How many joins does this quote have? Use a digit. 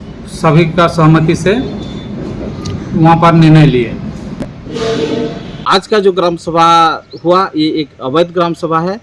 1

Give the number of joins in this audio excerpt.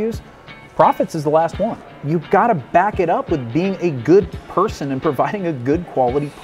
1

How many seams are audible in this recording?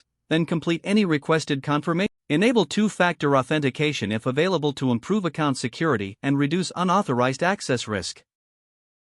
1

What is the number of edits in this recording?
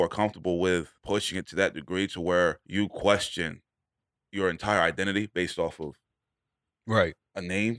2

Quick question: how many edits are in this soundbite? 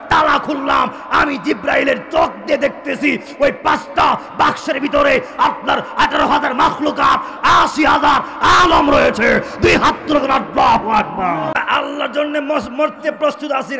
1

